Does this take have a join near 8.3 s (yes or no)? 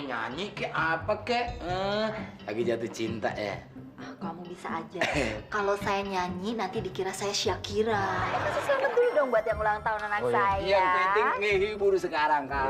yes